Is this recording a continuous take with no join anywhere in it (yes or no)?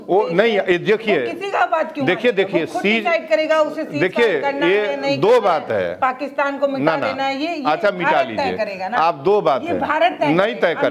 yes